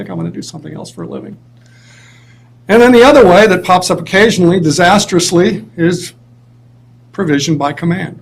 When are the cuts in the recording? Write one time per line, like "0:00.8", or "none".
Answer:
none